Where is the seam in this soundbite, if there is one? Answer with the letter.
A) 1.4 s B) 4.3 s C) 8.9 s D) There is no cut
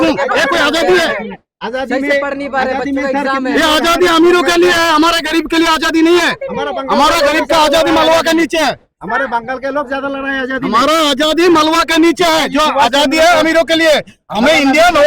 D